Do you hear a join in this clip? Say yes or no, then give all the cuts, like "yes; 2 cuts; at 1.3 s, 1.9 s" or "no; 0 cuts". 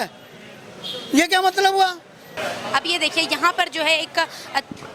yes; 1 cut; at 2.4 s